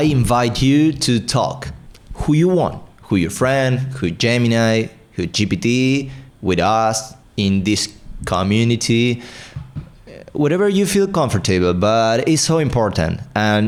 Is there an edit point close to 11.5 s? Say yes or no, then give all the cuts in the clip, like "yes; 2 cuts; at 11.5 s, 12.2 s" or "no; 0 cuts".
no; 0 cuts